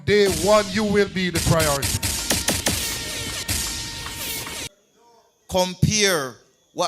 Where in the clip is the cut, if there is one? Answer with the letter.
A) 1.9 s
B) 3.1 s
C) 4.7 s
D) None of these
C